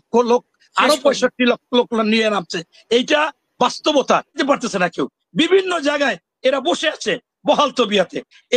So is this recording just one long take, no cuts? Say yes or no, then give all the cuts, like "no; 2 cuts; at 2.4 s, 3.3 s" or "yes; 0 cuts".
no; 1 cut; at 4.4 s